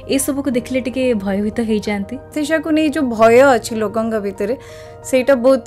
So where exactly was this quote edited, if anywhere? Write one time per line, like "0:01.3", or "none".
0:02.3